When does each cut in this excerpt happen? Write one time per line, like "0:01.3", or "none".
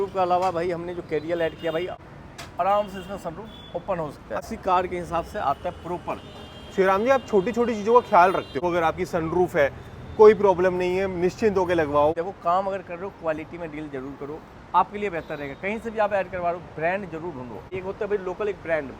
0:02.1
0:04.4
0:08.6
0:12.1
0:17.7